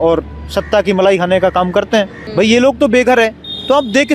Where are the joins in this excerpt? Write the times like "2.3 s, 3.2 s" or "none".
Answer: 2.2 s